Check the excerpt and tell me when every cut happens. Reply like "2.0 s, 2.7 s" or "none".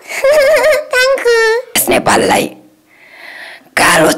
1.8 s